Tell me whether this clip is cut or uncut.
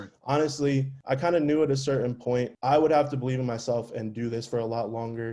cut